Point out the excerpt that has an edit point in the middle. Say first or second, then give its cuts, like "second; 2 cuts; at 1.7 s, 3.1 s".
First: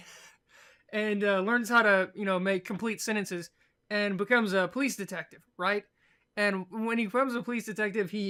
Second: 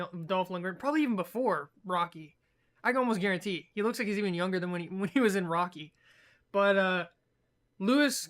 second; 1 cut; at 6.9 s